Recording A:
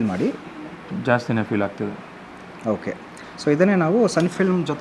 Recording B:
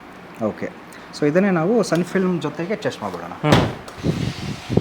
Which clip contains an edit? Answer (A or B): B